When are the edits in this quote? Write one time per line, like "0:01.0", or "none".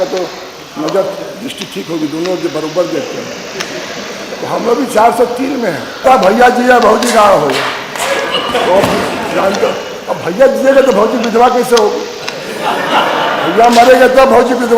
0:06.0

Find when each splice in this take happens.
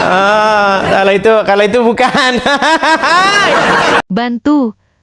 0:04.0

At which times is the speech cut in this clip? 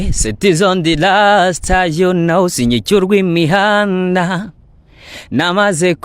none

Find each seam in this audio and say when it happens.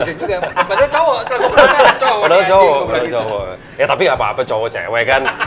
none

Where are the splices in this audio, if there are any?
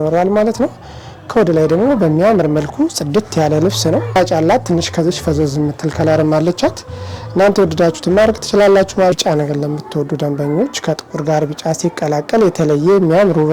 0:04.2
0:09.1

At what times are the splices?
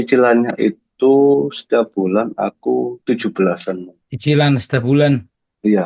0:03.0

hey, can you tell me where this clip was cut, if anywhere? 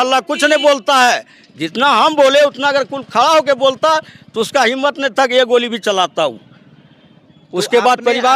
none

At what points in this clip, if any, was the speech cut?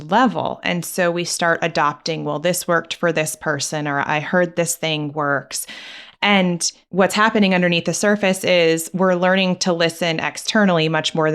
0:06.7

